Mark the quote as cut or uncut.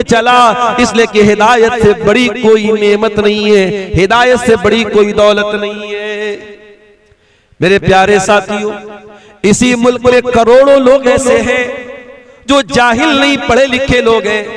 uncut